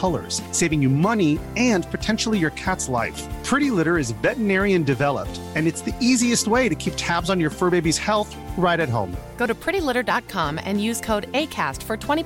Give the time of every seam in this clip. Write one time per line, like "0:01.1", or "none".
none